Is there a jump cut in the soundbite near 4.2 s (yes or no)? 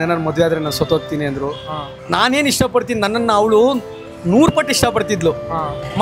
no